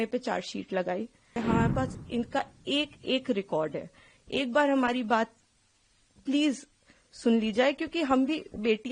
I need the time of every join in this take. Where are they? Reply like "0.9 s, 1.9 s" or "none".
1.4 s